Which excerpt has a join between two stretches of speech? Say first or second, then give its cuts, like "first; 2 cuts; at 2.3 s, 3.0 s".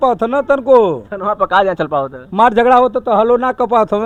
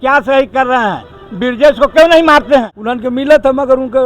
second; 1 cut; at 2.8 s